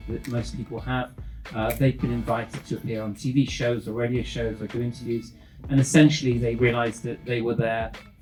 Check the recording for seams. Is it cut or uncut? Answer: uncut